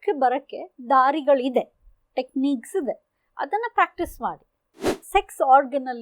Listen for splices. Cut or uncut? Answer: cut